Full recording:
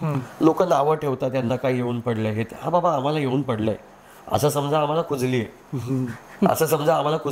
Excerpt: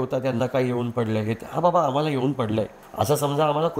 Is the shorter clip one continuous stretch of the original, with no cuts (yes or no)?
no